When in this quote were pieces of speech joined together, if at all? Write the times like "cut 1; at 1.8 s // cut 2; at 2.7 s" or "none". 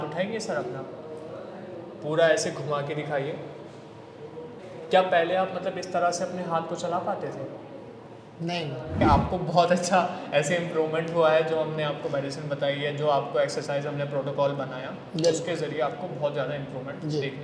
cut 1; at 4.6 s // cut 2; at 8.9 s